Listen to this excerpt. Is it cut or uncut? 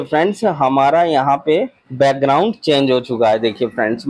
cut